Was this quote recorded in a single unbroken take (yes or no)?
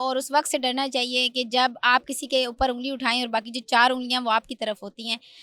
yes